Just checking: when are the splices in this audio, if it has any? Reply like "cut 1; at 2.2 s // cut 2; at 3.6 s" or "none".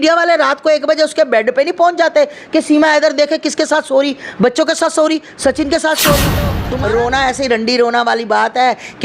cut 1; at 6.6 s